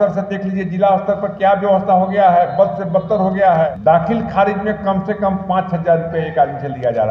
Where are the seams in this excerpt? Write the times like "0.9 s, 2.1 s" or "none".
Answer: 3.8 s